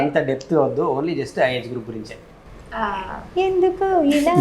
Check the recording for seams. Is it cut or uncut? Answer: uncut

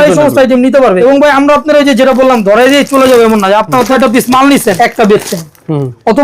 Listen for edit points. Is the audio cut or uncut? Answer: cut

